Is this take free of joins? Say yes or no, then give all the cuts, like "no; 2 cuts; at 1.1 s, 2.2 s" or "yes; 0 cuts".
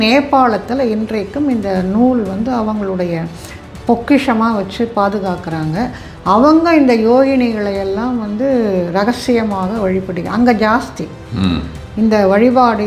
yes; 0 cuts